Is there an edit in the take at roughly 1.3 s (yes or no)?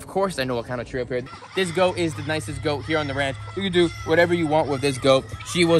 yes